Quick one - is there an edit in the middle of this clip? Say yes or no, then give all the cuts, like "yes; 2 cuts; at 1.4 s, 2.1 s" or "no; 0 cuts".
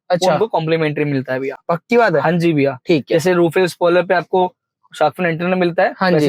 no; 0 cuts